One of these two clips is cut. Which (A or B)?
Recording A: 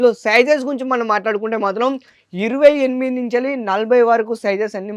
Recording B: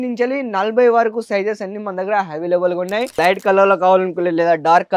B